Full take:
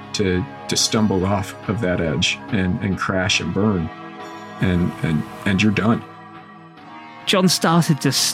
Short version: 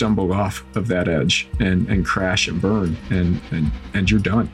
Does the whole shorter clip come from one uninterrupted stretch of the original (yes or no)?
no